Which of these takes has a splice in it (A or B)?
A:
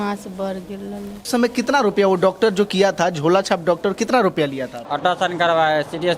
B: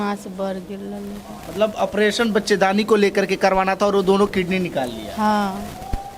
A